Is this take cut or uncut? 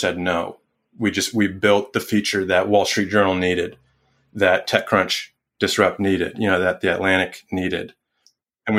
uncut